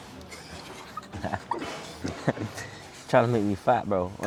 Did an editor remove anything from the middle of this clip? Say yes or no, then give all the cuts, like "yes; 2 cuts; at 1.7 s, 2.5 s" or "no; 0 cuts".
no; 0 cuts